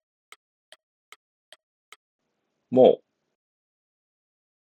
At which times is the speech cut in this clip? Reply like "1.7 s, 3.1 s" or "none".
2.0 s